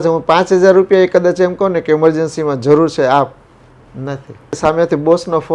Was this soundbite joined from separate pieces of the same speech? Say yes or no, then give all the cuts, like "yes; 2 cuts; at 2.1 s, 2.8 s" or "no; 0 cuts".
yes; 1 cut; at 4.6 s